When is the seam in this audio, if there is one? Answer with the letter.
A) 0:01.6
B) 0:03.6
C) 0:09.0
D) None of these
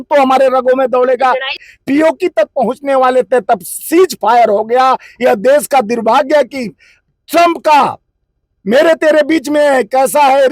A